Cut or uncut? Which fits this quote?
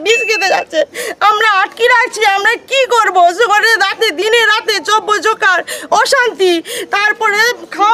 uncut